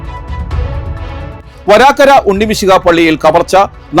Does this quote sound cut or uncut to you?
cut